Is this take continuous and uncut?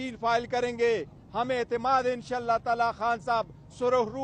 yes; 0 cuts

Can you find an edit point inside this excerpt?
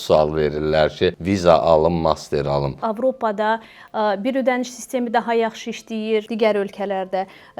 yes; 3 cuts; at 1.2 s, 2.8 s, 6.3 s

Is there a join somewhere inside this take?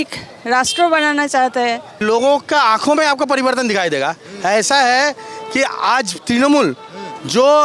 yes; 1 cut; at 2.0 s

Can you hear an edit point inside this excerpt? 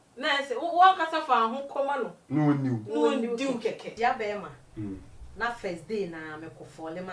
yes; 1 cut; at 3.9 s

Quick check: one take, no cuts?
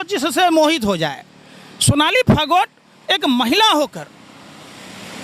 yes; 0 cuts

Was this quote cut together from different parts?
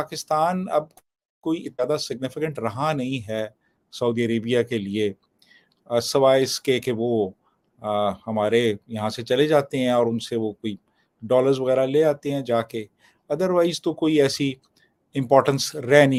no; 0 cuts

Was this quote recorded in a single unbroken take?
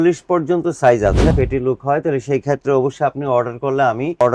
no; 1 cut; at 1.3 s

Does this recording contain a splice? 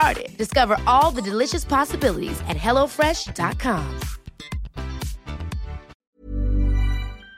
yes; 1 cut; at 6.1 s

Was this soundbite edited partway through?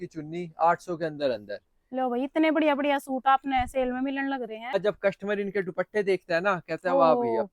yes; 1 cut; at 4.7 s

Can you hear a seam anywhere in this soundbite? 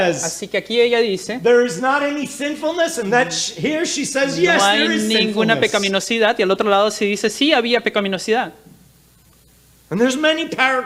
no; 0 cuts

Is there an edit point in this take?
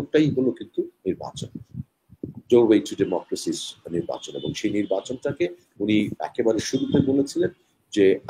no; 0 cuts

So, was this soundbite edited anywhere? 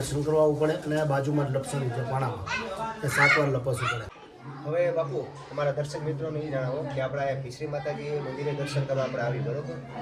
yes; 1 cut; at 4.2 s

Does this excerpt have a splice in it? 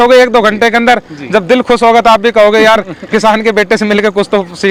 no; 0 cuts

